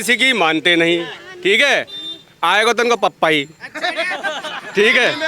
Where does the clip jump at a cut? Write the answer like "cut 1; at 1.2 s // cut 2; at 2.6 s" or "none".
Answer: none